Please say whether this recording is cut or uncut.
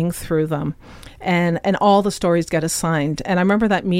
uncut